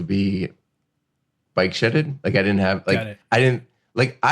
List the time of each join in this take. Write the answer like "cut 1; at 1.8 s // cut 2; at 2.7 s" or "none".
cut 1; at 1.4 s // cut 2; at 3.1 s